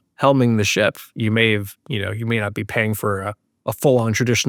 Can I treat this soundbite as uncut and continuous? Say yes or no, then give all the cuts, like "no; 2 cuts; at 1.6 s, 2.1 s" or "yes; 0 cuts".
yes; 0 cuts